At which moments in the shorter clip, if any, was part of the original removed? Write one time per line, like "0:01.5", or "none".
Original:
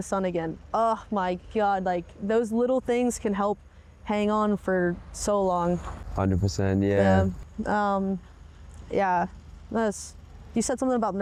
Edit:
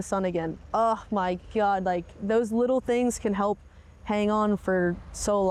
none